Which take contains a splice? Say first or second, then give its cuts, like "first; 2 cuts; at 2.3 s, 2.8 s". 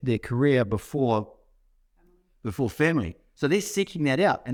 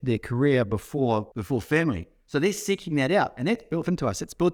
second; 1 cut; at 1.3 s